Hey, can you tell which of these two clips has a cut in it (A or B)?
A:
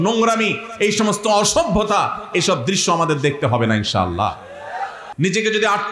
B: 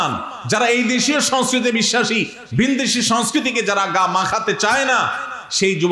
A